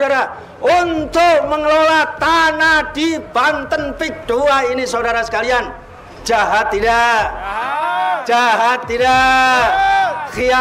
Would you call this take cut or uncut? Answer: uncut